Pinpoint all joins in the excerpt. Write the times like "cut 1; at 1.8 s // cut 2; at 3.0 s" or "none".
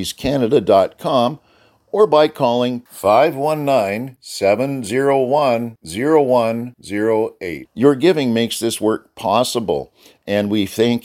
none